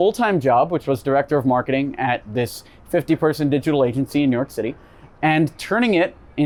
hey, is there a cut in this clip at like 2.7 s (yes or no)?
no